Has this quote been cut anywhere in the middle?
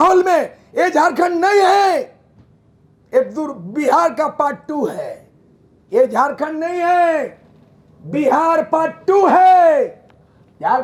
no; 0 cuts

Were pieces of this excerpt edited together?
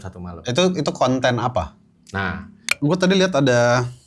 yes; 1 cut; at 2.7 s

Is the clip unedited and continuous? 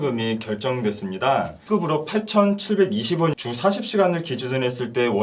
no; 2 cuts; at 1.6 s, 3.3 s

